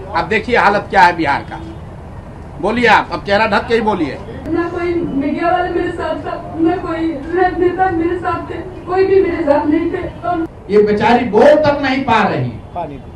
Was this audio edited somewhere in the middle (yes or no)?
yes